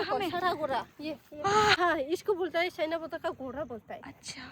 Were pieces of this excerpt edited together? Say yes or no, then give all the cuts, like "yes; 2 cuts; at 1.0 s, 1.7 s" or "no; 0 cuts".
yes; 1 cut; at 1.8 s